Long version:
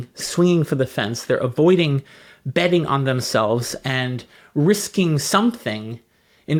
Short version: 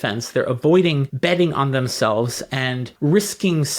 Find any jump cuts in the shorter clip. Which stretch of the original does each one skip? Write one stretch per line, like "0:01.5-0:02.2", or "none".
0:02.0-0:02.4
0:04.2-0:04.4